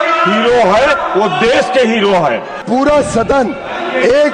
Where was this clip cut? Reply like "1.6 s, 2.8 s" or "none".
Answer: 2.6 s